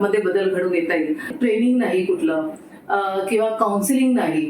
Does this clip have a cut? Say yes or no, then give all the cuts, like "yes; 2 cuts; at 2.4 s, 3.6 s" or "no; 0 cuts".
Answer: yes; 1 cut; at 1.3 s